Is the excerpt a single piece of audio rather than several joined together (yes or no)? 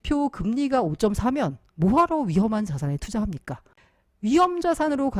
no